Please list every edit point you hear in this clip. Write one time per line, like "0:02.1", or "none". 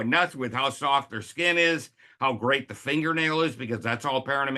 none